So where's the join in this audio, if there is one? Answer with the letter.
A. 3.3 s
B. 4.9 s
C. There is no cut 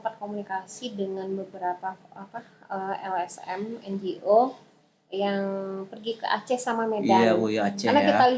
C